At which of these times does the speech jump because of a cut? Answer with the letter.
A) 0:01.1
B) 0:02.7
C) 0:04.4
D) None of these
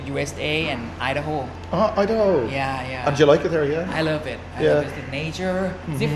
D